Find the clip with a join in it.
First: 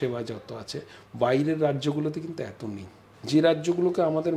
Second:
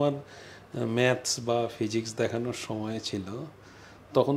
first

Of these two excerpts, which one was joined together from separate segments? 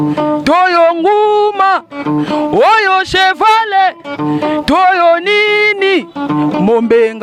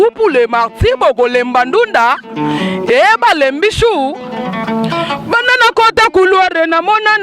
second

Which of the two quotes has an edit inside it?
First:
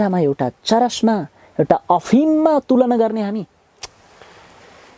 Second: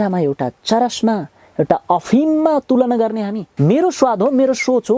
second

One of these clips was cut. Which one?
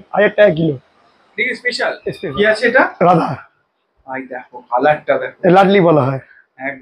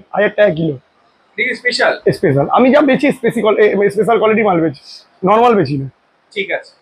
first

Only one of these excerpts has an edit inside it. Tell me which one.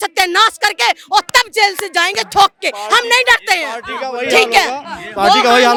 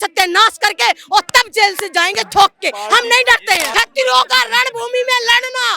second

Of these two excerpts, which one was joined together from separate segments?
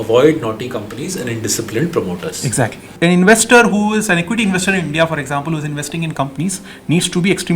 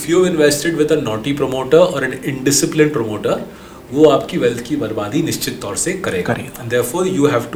first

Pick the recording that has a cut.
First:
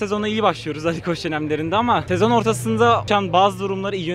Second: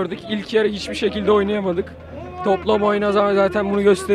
first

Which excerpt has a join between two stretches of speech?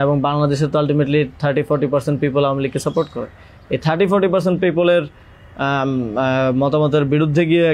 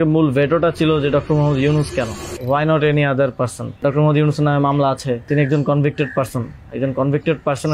second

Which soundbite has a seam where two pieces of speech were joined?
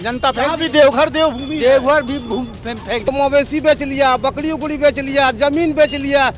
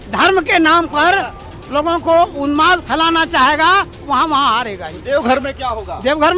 first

